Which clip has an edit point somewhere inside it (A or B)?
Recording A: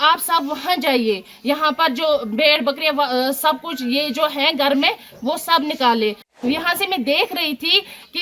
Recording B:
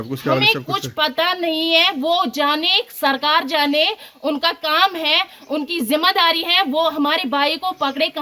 A